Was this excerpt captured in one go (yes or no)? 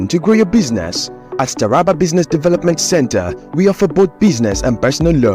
no